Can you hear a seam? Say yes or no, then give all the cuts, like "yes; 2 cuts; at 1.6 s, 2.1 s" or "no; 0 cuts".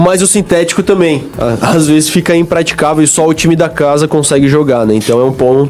no; 0 cuts